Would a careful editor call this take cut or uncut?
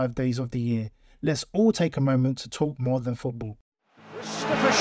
cut